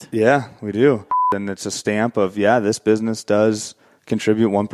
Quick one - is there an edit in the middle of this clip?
yes; 1 cut; at 1.3 s

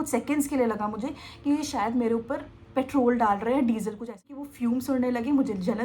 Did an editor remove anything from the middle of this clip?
yes; 1 cut; at 4.2 s

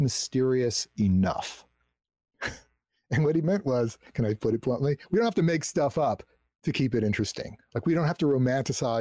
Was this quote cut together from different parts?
no; 0 cuts

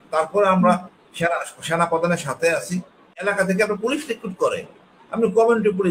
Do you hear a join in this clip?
yes; 1 cut; at 3.2 s

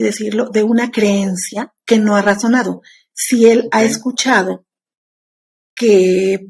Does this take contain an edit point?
no; 0 cuts

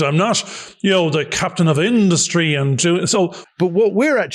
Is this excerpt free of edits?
no; 1 cut; at 3.4 s

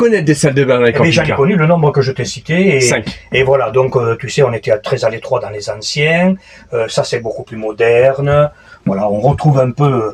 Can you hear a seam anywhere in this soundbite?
no; 0 cuts

